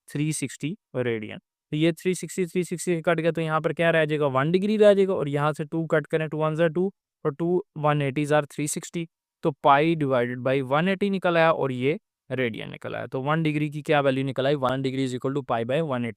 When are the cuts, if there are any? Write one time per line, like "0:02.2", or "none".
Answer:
0:14.7